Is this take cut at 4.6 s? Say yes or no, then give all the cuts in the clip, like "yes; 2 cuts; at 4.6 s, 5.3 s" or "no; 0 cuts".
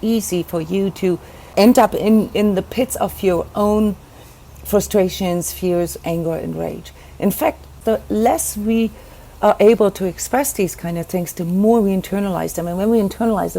no; 2 cuts; at 1.5 s, 7.8 s